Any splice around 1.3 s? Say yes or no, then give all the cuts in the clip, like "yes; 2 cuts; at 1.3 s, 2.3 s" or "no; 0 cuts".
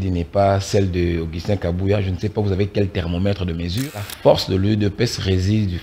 no; 1 cut; at 4.1 s